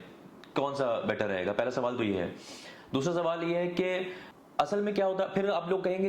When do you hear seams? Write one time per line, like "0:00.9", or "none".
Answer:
0:04.2